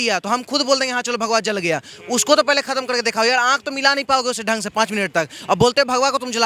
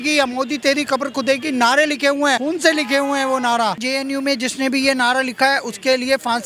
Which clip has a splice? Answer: second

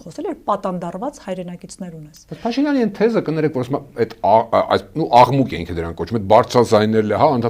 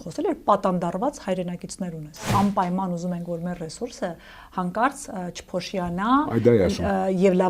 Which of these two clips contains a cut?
second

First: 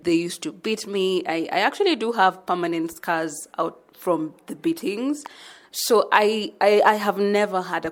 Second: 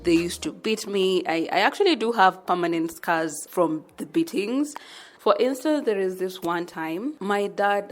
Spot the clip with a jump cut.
second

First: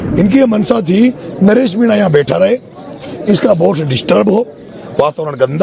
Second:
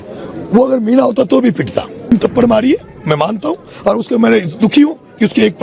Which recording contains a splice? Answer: second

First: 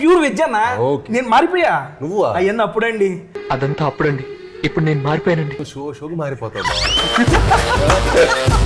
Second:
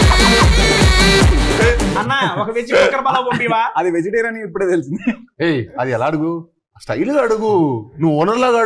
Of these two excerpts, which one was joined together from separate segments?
second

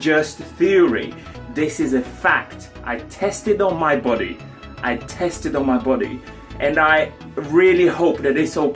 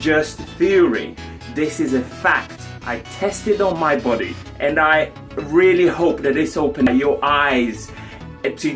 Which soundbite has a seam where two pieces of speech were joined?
second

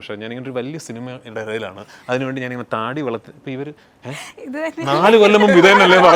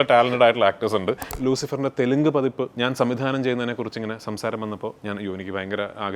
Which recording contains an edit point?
second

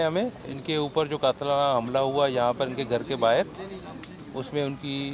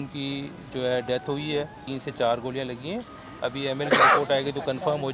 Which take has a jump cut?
second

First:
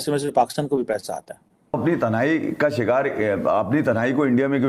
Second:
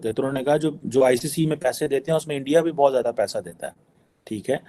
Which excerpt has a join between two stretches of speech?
first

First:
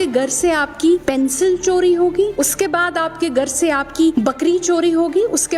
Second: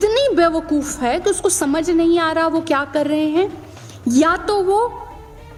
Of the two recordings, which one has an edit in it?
first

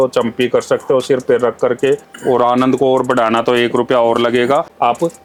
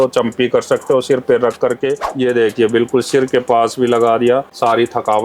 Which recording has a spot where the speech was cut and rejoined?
second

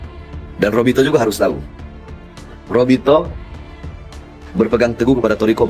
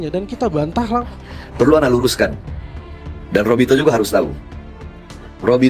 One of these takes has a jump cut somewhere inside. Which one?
second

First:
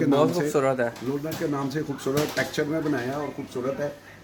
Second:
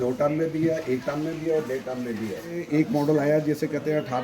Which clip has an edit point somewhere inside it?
second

